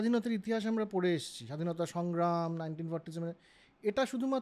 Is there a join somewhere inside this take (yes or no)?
no